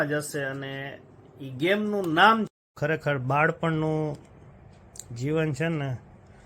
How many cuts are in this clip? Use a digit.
1